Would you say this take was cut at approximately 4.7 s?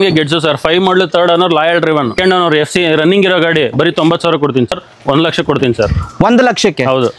yes; 2 cuts; at 2.2 s, 4.7 s

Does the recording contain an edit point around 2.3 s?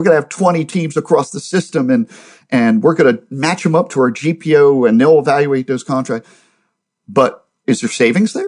no; 1 cut; at 7.5 s

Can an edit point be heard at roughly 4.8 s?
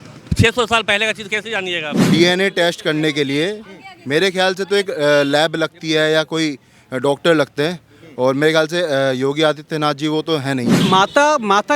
no; 2 cuts; at 1.9 s, 10.8 s

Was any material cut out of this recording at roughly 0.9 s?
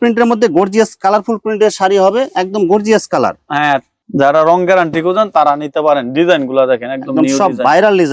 no; 1 cut; at 4.0 s

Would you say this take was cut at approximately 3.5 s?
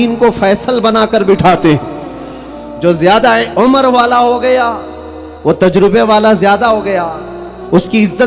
yes; 1 cut; at 3.5 s

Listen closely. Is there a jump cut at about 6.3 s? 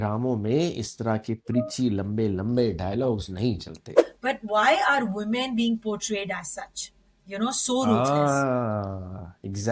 no; 1 cut; at 3.9 s

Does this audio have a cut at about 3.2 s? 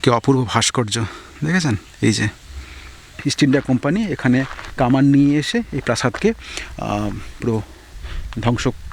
yes; 1 cut; at 3.2 s

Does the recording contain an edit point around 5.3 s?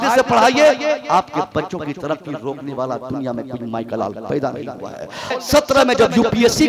yes; 1 cut; at 5.3 s

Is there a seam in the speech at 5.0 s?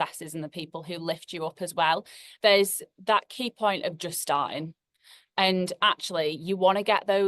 no; 1 cut; at 2.2 s

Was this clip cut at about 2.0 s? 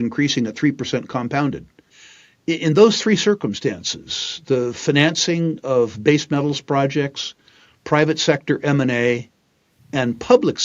yes; 1 cut; at 2.0 s

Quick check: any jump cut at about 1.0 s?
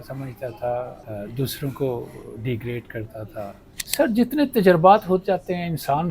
yes; 2 cuts; at 1.0 s, 3.7 s

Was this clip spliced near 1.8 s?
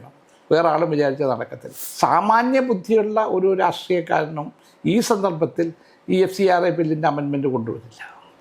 yes; 1 cut; at 1.8 s

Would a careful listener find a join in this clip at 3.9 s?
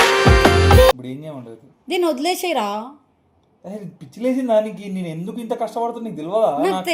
no; 1 cut; at 1.1 s

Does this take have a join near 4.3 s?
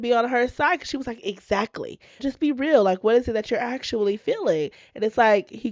no; 1 cut; at 2.2 s

